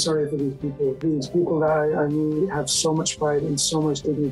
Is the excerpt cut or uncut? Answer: cut